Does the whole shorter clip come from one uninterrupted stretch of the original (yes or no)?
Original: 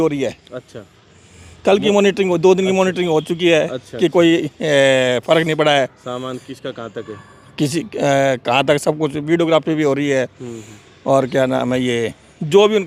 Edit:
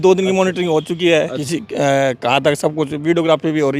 no